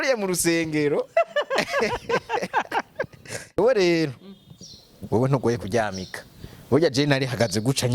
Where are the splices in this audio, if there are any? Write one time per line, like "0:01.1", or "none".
0:03.6